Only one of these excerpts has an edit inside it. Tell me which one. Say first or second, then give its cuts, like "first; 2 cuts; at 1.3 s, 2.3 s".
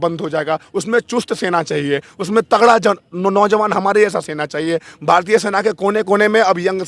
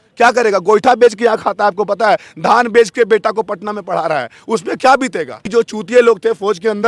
second; 1 cut; at 5.5 s